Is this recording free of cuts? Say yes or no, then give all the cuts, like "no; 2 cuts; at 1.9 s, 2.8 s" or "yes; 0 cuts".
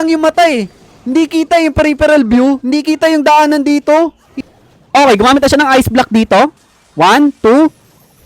no; 1 cut; at 4.3 s